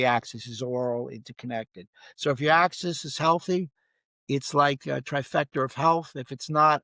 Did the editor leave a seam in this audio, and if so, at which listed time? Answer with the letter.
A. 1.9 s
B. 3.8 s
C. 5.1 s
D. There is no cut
D